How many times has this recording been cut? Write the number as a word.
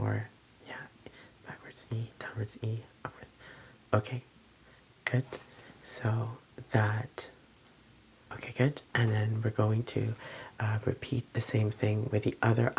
one